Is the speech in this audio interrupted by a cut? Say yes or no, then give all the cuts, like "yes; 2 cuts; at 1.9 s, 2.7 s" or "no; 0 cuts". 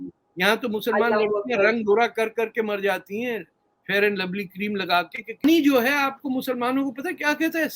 yes; 1 cut; at 5.4 s